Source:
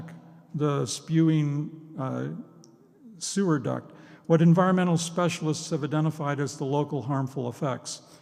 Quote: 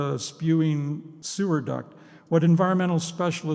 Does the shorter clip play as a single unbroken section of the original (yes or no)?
no